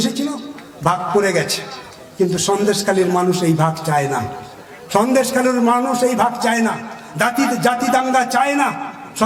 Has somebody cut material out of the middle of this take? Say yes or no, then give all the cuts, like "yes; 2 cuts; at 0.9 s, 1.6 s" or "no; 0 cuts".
no; 0 cuts